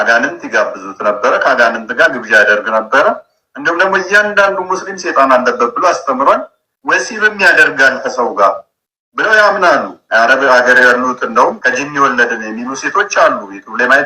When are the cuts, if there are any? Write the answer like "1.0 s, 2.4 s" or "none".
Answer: 10.0 s, 11.6 s